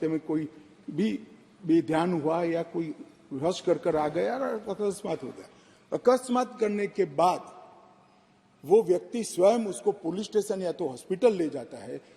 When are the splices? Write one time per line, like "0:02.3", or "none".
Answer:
none

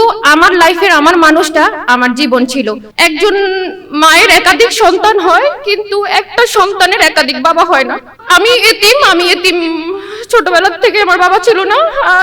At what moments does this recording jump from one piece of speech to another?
0:02.8

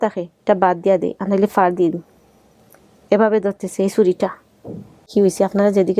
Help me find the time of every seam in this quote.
0:05.1

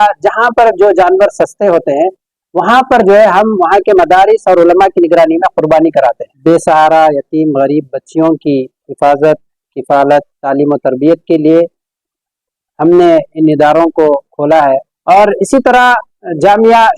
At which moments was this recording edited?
0:06.3
0:14.9

